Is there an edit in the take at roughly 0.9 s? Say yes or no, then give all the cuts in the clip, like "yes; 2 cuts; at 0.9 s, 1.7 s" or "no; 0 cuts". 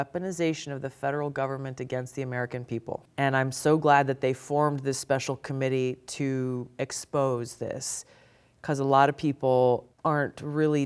no; 2 cuts; at 3.0 s, 9.9 s